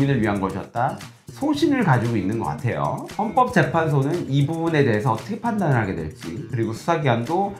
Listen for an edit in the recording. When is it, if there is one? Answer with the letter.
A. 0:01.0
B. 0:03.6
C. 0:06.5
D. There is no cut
D